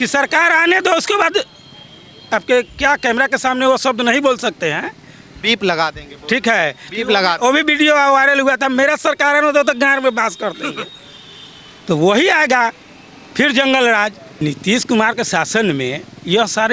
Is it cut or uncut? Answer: cut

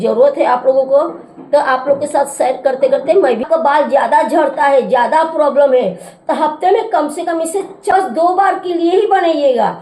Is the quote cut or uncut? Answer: cut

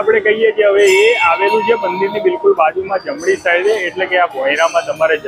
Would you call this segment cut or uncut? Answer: uncut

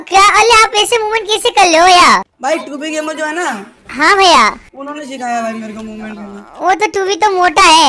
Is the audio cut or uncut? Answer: cut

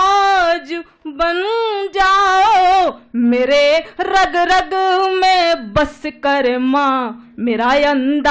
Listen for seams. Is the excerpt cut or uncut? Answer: uncut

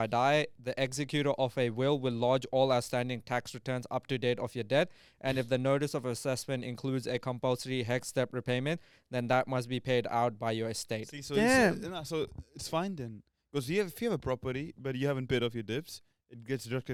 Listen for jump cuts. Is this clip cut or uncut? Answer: uncut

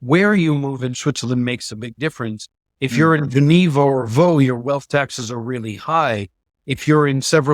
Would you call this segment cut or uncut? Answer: uncut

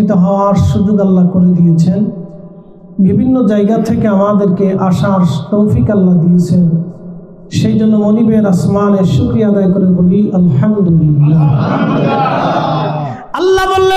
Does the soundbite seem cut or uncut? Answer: cut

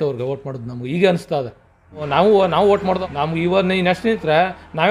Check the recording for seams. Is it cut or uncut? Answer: cut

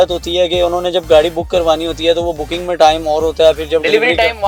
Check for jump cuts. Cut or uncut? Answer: uncut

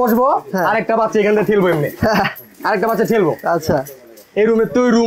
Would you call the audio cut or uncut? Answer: uncut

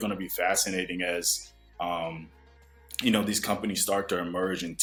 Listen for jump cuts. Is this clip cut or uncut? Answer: uncut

